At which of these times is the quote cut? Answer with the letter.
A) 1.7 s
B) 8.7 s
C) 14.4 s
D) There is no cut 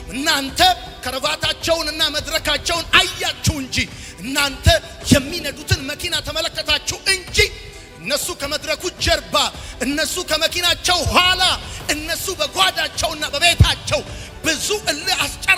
D